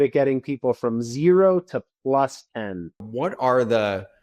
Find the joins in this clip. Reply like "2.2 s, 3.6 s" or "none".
3.0 s